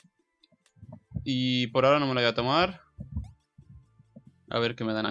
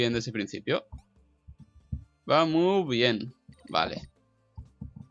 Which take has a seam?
first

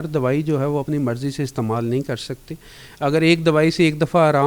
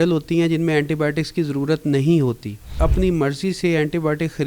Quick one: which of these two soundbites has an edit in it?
second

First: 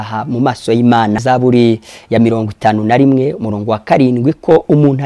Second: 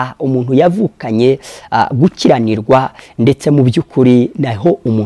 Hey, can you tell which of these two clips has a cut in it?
first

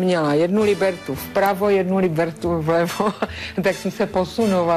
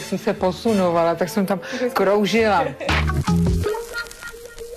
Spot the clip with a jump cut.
second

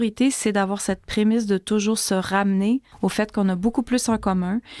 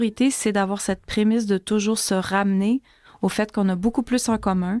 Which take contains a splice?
first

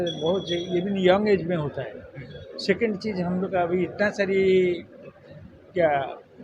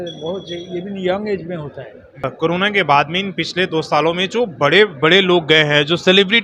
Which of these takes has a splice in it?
second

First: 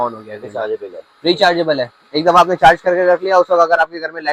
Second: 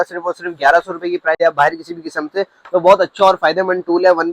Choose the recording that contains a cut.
second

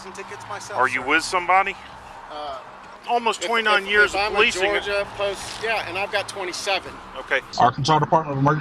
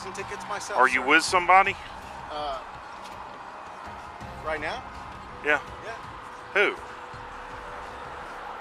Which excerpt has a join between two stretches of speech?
first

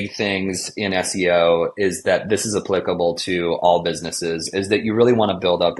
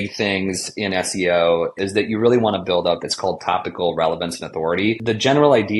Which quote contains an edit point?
second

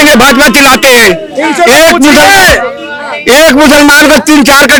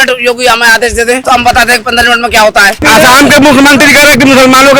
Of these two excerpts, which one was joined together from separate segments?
second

